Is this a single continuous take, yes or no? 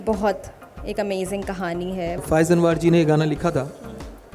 no